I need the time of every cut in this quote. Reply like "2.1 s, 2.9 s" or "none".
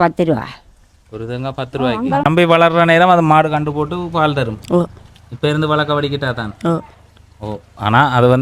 2.2 s